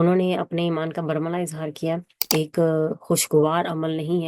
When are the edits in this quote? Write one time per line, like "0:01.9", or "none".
0:02.1